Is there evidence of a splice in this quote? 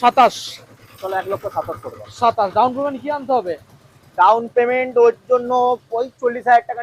no; 0 cuts

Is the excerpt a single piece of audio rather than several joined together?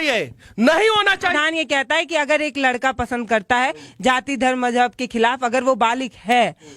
no; 1 cut; at 1.4 s

